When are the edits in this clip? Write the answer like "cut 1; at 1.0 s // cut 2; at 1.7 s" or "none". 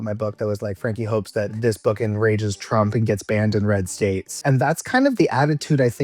cut 1; at 1.6 s // cut 2; at 4.4 s